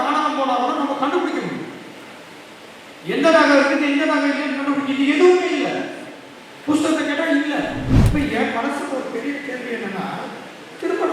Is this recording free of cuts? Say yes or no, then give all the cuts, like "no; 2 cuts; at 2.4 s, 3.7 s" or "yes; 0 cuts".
no; 1 cut; at 7.9 s